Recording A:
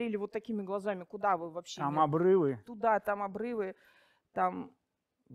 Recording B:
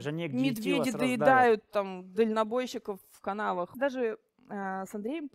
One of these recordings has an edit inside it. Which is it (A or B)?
B